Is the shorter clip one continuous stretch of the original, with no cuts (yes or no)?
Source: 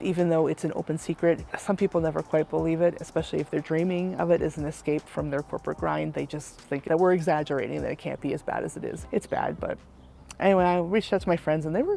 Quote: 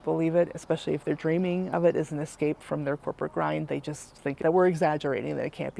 yes